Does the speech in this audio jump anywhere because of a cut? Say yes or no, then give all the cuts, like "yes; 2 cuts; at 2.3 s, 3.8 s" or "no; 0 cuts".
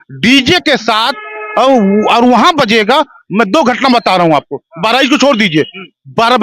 no; 0 cuts